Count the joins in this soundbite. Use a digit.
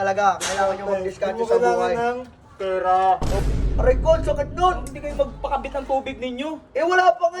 1